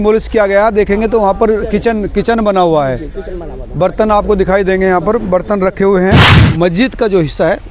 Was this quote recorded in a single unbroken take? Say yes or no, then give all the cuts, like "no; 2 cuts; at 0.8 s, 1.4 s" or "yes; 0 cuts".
no; 1 cut; at 6.4 s